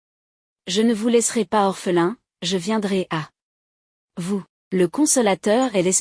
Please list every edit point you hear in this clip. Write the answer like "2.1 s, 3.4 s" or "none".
4.5 s

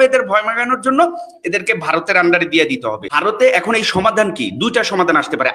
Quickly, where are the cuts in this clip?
3.1 s

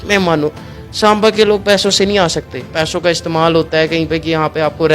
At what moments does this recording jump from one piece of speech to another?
2.7 s

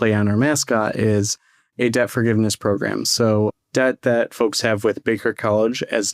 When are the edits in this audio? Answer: 3.5 s

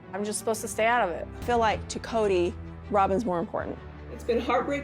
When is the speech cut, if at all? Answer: 1.4 s

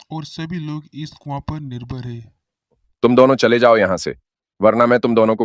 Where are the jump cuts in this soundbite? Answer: 2.9 s

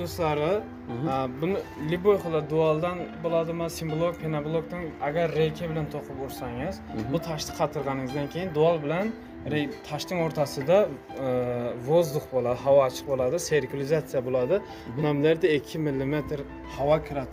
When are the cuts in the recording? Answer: none

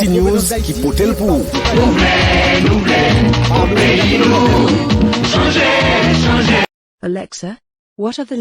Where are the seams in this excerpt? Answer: 6.6 s

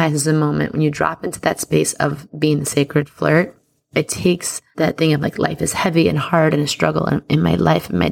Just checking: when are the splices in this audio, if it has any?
3.8 s, 4.6 s

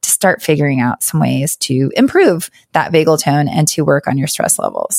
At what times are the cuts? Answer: 1.9 s

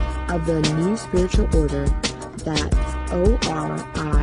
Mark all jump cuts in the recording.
3.2 s

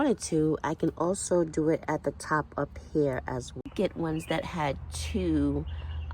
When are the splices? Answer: 3.6 s

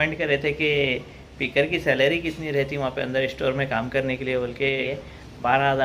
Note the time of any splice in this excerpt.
none

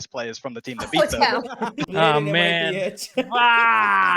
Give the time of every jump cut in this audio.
1.8 s

